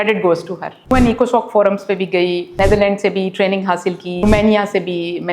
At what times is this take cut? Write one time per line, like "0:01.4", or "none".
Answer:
0:00.9
0:02.5
0:04.1

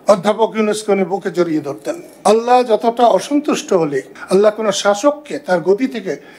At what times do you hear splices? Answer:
0:02.1
0:04.1

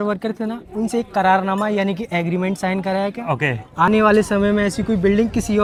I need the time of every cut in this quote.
none

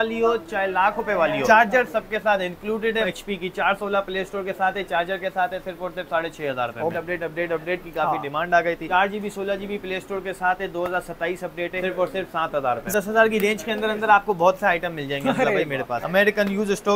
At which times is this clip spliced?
0:01.4
0:03.1
0:07.0
0:08.9
0:11.8
0:12.9
0:16.0

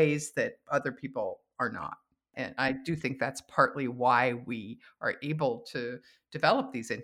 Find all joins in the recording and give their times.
0:02.3

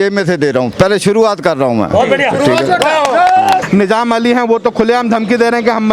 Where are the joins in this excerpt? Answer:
0:03.6

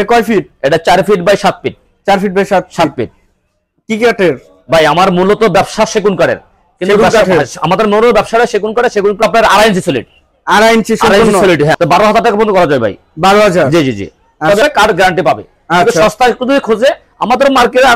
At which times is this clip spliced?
0:09.2
0:11.8
0:14.6

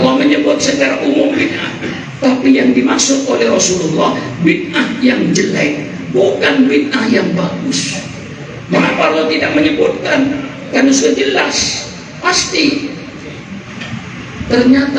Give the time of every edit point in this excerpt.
none

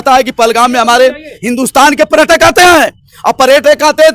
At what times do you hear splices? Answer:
none

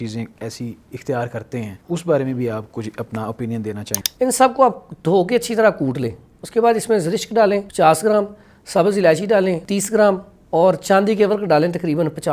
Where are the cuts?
0:01.8
0:03.9
0:07.7
0:09.6

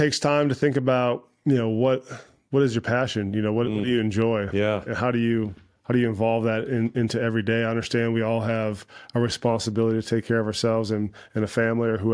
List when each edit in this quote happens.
none

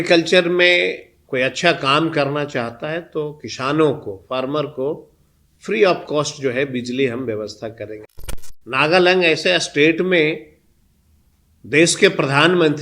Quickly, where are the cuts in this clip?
0:08.0

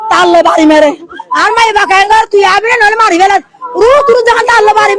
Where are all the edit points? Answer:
none

